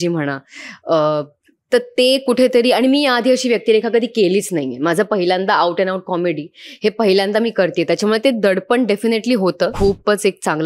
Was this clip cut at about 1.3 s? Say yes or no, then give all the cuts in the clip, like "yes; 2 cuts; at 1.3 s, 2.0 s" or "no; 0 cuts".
no; 1 cut; at 9.7 s